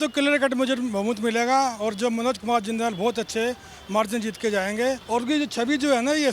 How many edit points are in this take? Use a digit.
1